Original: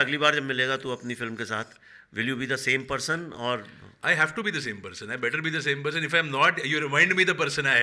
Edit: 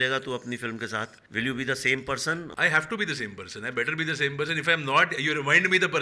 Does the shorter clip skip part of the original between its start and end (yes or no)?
yes